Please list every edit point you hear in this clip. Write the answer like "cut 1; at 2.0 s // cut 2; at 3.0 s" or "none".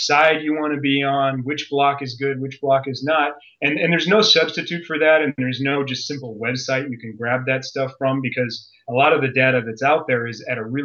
none